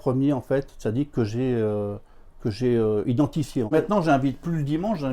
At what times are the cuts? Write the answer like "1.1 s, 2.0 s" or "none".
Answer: 3.7 s